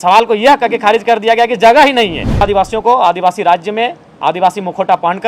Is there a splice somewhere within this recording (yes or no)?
yes